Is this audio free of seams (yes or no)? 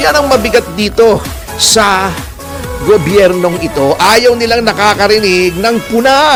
yes